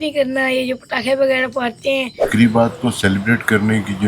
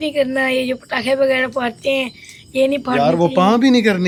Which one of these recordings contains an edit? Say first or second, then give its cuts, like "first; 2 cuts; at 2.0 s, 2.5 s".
first; 1 cut; at 2.2 s